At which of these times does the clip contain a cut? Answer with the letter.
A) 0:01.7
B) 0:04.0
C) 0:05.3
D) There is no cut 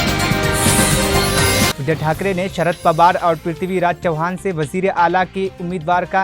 A